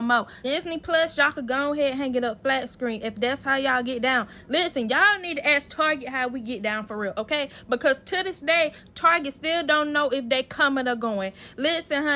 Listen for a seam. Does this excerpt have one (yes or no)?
no